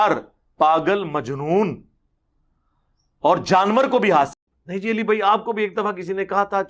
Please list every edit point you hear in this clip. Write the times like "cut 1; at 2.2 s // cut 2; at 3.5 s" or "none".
cut 1; at 4.3 s